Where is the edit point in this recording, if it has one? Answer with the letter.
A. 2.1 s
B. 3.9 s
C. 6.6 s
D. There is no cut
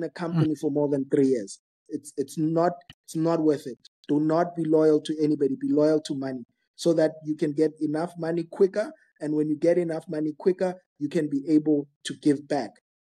D